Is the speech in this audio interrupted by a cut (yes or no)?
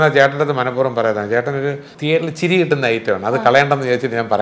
yes